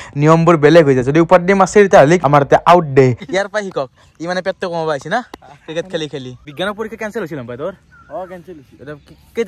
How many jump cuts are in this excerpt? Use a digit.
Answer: 3